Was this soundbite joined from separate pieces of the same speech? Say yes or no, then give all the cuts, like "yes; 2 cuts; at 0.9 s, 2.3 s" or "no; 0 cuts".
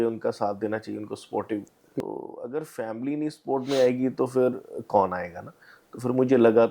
yes; 1 cut; at 2.0 s